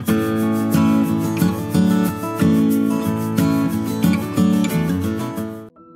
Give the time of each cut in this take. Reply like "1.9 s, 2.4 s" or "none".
none